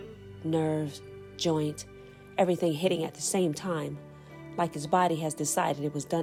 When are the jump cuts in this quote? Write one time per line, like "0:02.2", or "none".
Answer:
none